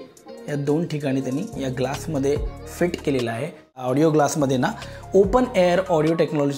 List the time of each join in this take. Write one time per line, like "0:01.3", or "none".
0:03.8

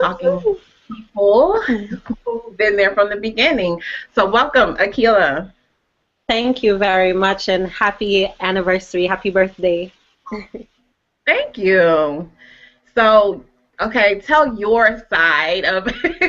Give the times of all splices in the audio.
0:07.2

